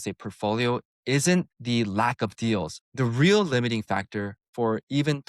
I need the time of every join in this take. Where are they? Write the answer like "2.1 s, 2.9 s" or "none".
1.6 s, 2.8 s